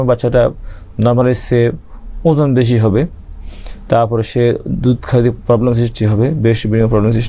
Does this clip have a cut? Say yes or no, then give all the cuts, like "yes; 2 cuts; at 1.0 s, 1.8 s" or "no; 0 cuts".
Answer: no; 0 cuts